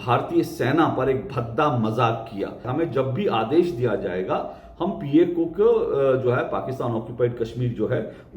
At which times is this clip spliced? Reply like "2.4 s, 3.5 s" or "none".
2.7 s